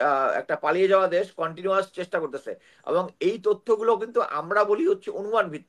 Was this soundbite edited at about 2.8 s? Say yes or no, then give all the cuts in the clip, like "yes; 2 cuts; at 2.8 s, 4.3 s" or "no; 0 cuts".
no; 0 cuts